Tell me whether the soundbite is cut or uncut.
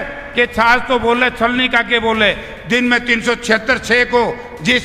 uncut